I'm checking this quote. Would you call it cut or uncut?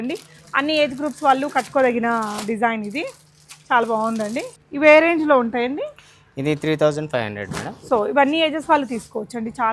uncut